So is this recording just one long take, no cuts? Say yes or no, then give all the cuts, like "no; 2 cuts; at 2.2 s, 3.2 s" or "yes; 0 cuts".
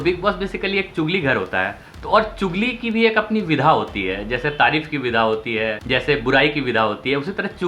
no; 1 cut; at 5.8 s